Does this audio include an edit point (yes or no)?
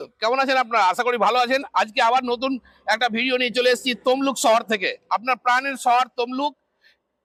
no